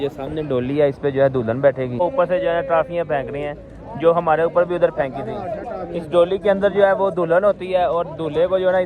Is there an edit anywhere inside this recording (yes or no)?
yes